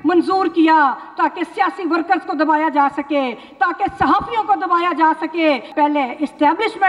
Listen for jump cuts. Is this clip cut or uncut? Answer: cut